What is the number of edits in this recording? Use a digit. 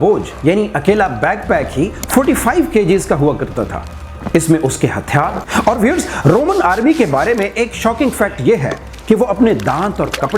1